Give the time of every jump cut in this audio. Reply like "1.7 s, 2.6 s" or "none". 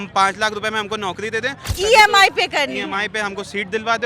1.6 s